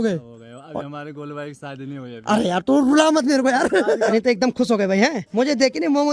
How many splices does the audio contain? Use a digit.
2